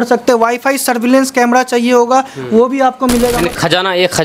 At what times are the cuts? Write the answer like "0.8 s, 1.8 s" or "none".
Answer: 3.4 s